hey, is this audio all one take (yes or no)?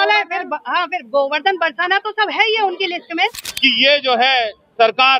no